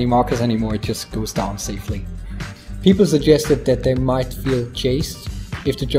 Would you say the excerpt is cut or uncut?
uncut